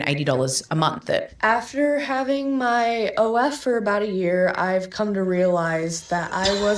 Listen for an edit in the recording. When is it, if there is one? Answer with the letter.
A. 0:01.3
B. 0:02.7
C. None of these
A